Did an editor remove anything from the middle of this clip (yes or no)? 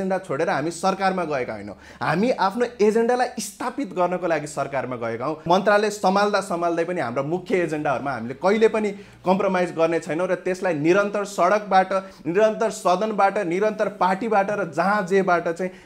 yes